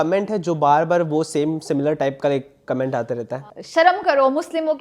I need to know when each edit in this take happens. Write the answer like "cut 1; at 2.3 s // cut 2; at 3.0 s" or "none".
cut 1; at 3.4 s